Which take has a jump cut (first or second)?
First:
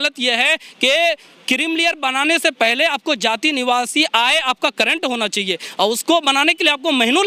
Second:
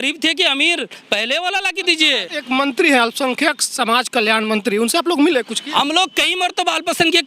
second